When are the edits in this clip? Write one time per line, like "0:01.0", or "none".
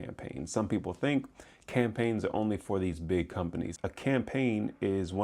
0:03.7